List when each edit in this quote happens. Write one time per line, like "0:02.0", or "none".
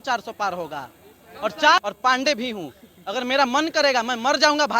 0:01.8